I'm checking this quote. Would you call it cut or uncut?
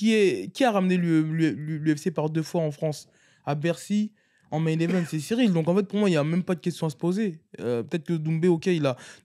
uncut